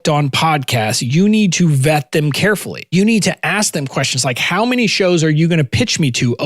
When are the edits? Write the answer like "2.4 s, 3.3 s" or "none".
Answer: 2.8 s